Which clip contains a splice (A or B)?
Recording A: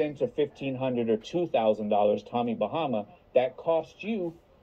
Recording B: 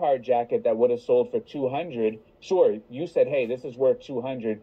A